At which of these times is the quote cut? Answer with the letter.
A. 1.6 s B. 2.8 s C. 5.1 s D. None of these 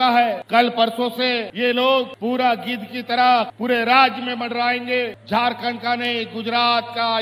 C